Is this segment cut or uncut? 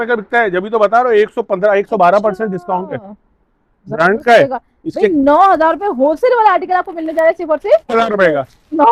cut